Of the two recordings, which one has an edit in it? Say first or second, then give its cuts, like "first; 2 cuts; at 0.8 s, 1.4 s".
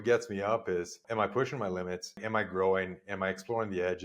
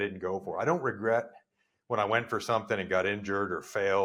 first; 2 cuts; at 1.0 s, 2.2 s